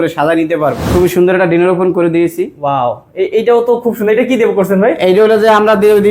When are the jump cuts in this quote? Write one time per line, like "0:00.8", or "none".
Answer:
0:00.9